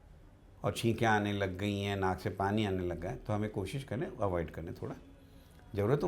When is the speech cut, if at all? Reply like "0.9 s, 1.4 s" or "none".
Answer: none